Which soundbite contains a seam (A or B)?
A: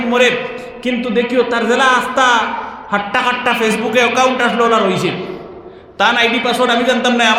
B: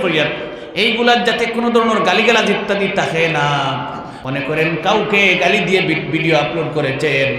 B